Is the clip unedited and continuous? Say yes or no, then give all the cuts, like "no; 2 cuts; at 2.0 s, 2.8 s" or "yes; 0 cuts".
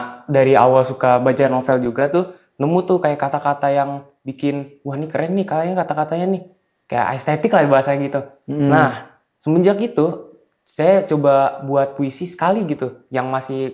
yes; 0 cuts